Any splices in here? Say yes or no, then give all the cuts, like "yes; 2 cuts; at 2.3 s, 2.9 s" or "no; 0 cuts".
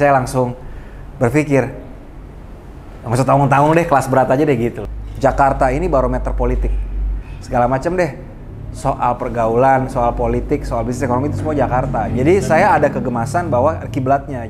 yes; 1 cut; at 4.9 s